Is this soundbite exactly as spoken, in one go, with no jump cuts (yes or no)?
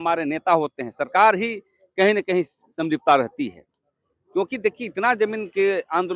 yes